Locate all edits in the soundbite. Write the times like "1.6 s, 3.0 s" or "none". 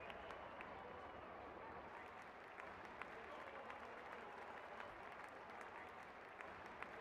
none